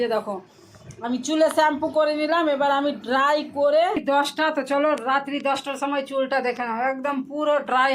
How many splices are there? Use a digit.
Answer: 1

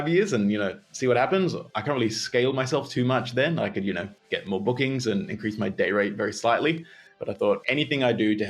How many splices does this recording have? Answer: 2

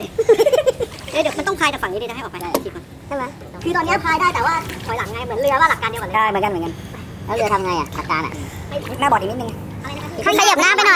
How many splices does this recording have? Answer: 2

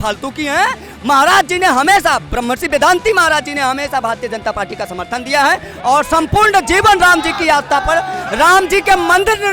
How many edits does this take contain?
0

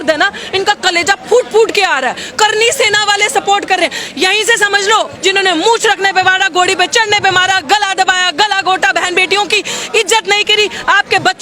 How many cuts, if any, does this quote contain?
1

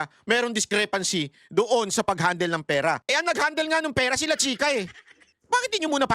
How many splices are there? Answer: 1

